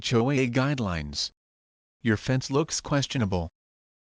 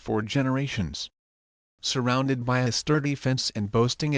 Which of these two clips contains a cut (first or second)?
second